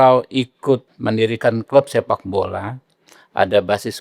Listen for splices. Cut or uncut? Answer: cut